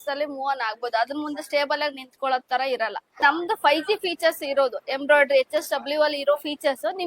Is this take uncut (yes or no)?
no